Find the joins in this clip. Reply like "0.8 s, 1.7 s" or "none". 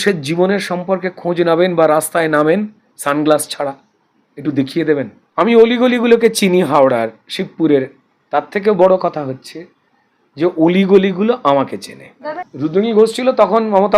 5.2 s, 12.5 s